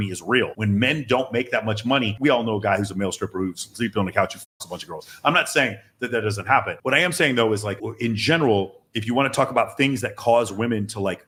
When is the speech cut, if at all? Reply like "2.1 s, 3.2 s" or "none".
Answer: none